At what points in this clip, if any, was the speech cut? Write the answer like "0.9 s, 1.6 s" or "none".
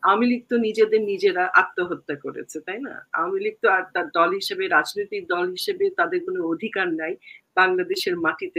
none